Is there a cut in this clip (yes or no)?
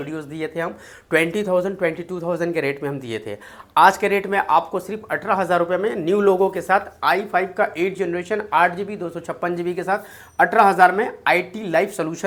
no